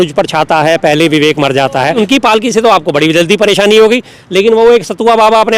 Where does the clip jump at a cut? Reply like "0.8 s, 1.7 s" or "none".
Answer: 2.0 s